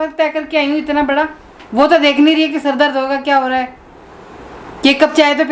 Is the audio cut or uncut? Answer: uncut